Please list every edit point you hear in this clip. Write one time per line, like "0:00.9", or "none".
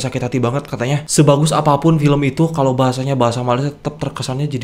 0:01.0